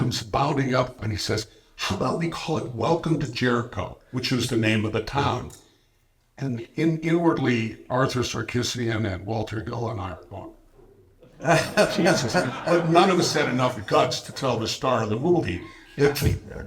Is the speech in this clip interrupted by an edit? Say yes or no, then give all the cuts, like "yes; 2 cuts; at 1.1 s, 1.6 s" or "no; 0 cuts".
yes; 1 cut; at 1.0 s